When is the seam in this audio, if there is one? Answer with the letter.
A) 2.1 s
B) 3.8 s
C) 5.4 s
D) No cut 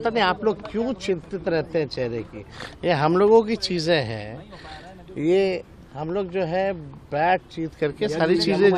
D